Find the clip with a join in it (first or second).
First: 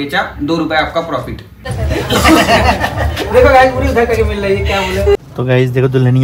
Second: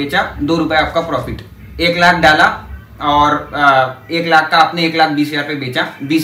first